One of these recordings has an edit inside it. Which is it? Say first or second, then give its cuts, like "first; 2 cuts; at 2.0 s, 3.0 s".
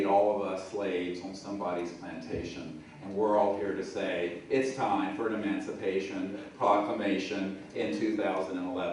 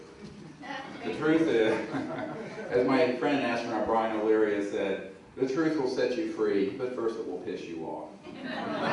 second; 1 cut; at 1.3 s